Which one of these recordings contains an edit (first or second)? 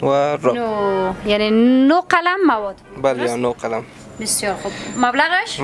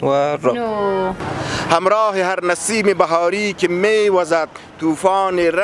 second